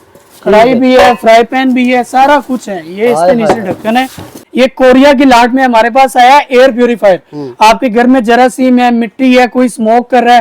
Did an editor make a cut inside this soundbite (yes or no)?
yes